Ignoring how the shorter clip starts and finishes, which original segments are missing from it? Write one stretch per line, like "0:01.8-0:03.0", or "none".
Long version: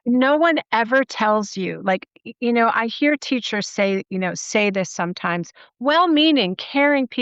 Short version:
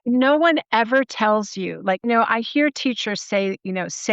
0:02.1-0:02.5